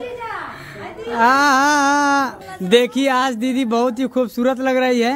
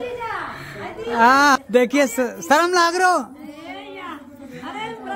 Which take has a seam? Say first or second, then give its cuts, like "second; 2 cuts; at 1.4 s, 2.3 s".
second; 1 cut; at 1.6 s